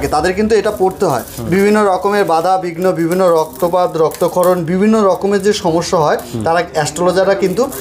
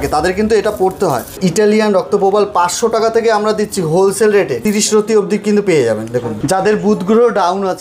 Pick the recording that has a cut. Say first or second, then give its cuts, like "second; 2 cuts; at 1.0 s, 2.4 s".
second; 3 cuts; at 1.4 s, 4.6 s, 6.3 s